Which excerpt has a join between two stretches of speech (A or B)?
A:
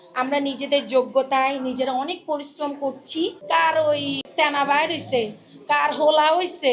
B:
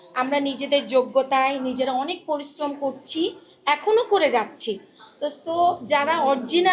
A